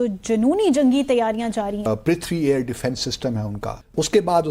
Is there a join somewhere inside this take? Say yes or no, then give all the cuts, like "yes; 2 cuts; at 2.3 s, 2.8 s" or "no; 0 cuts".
yes; 2 cuts; at 1.9 s, 3.7 s